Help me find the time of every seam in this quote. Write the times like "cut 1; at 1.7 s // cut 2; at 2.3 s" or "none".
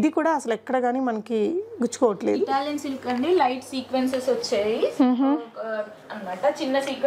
none